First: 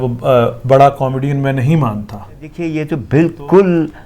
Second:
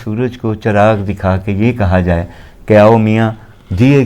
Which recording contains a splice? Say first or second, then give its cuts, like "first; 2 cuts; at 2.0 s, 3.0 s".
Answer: first; 1 cut; at 2.7 s